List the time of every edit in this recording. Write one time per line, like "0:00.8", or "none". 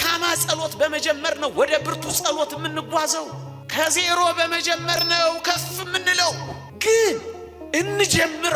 none

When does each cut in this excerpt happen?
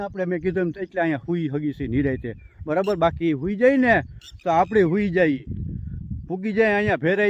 none

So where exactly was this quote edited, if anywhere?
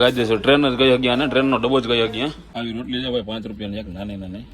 0:02.4

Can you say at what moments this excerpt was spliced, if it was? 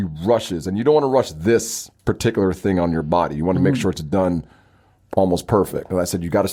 none

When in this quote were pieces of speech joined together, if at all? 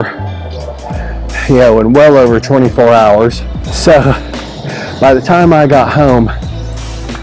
0:03.6

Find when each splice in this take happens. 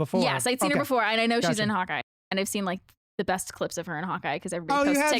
0:02.1

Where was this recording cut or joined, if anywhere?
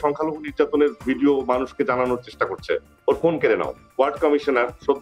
0:03.9

